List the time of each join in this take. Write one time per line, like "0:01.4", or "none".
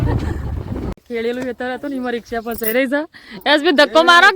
0:01.0